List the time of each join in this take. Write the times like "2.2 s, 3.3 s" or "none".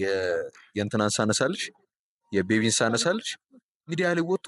none